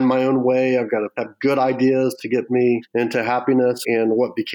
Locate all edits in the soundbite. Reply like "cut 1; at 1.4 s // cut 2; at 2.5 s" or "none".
cut 1; at 1.2 s // cut 2; at 2.9 s // cut 3; at 3.8 s